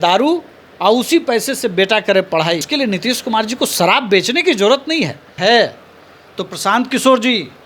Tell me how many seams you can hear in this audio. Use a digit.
2